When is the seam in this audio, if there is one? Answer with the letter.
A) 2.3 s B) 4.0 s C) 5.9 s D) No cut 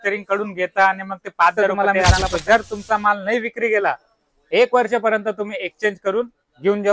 A